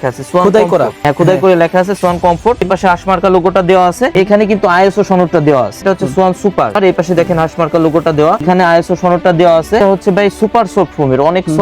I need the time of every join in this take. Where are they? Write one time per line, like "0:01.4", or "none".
0:01.0
0:02.7
0:04.1
0:05.8
0:06.8
0:08.4
0:09.8